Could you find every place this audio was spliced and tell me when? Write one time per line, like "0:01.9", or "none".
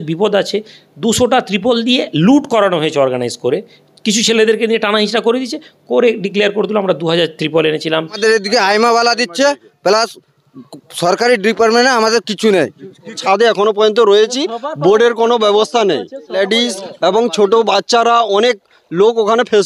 0:08.2
0:13.2
0:16.4